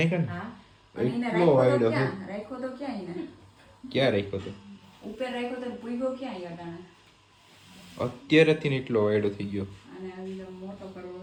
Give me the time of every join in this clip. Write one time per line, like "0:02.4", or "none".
none